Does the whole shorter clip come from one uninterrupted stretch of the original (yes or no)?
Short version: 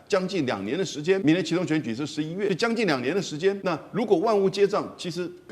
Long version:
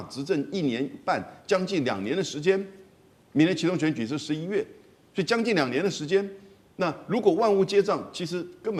no